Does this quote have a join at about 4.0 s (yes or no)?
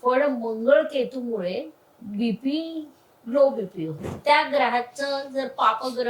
yes